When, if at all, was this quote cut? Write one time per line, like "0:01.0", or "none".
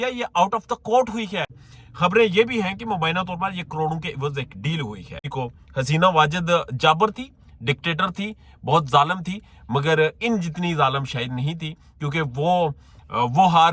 0:01.7
0:05.3